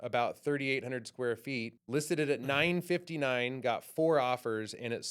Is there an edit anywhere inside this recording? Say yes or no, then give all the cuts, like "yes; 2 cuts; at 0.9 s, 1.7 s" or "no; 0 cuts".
yes; 1 cut; at 1.8 s